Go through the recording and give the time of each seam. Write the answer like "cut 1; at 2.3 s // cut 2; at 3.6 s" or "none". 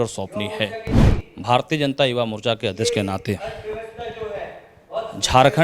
cut 1; at 1.0 s